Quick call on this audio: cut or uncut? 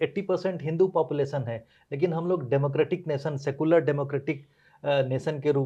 uncut